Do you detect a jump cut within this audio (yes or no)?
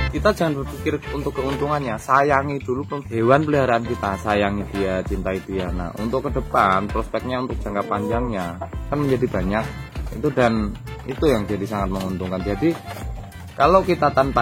yes